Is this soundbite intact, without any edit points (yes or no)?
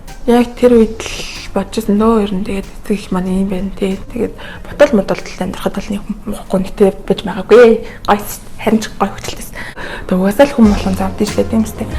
no